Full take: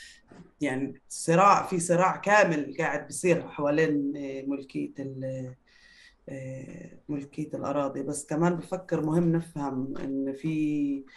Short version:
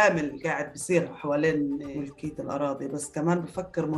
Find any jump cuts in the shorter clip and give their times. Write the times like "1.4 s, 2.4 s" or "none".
1.9 s